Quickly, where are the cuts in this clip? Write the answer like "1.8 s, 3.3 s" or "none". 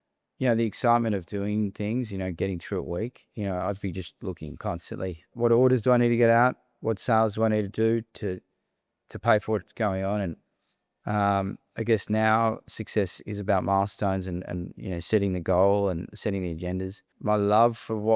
5.3 s, 17.1 s